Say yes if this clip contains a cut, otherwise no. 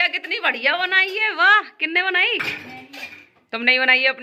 no